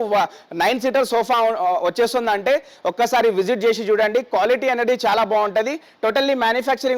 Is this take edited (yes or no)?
no